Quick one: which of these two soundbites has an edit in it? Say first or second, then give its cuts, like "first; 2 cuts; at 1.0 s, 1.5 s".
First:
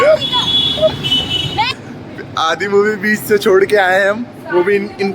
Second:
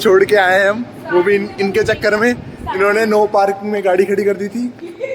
first; 1 cut; at 1.9 s